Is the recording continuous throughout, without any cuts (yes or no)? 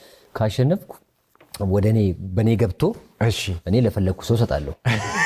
yes